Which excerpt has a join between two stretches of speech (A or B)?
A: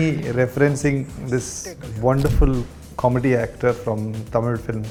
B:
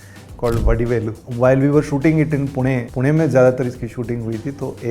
B